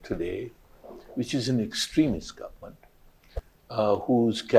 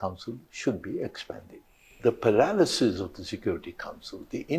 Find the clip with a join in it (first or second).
second